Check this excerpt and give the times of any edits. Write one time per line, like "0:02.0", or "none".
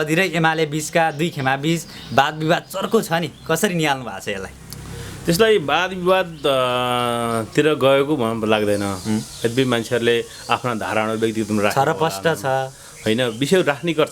none